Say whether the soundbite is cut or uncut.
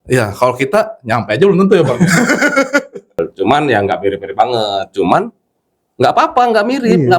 cut